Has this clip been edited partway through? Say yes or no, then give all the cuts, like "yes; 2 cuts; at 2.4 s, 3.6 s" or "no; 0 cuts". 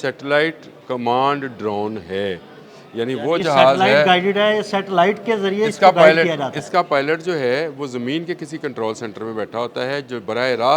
no; 0 cuts